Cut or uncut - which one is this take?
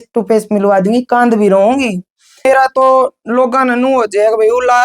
cut